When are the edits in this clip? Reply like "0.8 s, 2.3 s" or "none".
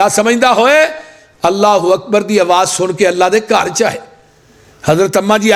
none

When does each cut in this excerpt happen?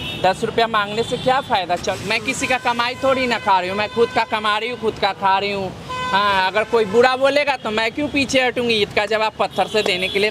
1.9 s

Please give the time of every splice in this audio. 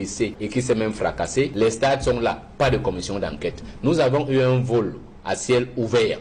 none

